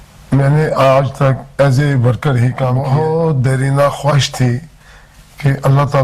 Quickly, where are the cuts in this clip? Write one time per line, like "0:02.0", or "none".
0:02.8